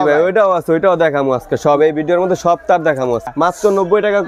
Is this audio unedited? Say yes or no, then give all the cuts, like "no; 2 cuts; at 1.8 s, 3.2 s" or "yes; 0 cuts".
no; 1 cut; at 3.3 s